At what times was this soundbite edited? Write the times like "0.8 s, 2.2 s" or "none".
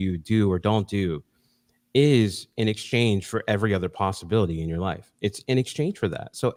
none

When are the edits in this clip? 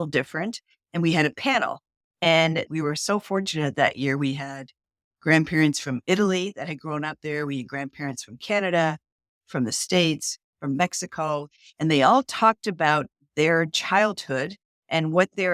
2.7 s

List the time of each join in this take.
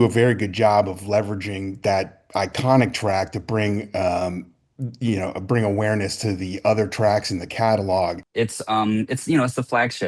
8.2 s

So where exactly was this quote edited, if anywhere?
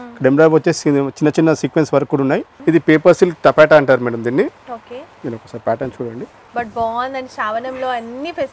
2.5 s, 6.4 s

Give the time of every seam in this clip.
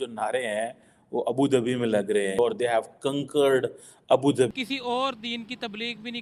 2.3 s, 4.5 s

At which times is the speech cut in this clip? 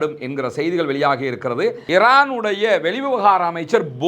1.8 s

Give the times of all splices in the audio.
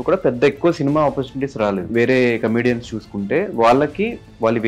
1.9 s

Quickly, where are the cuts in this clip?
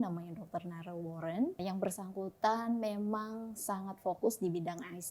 1.6 s

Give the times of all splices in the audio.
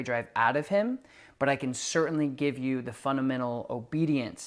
none

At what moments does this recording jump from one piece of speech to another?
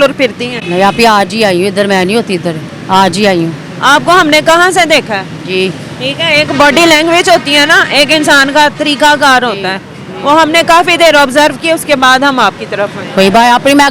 none

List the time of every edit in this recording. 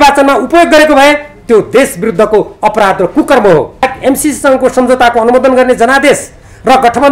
3.9 s

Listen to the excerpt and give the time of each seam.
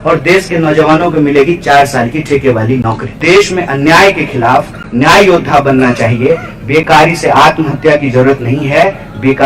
3.2 s

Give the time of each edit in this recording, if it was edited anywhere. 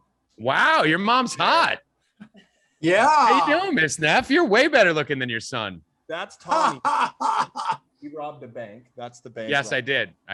none

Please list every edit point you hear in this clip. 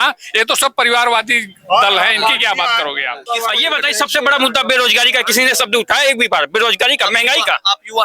3.2 s

